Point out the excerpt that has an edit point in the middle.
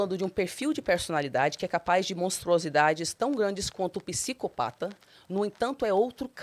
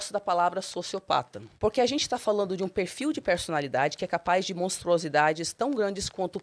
second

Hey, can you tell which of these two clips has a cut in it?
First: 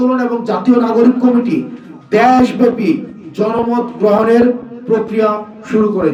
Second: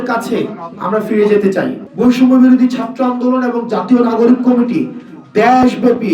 second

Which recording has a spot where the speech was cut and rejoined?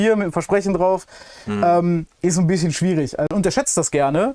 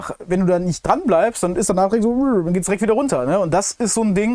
first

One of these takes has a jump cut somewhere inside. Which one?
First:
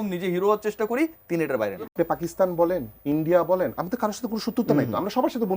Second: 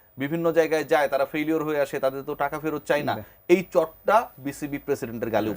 first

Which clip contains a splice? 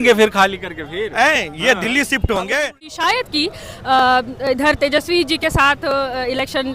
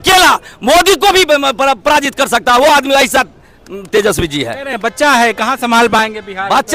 first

